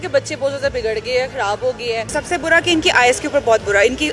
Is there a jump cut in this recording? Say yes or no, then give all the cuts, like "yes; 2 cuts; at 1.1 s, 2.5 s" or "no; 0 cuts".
yes; 1 cut; at 2.2 s